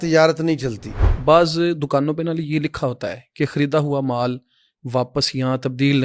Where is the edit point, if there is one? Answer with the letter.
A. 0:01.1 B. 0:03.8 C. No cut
A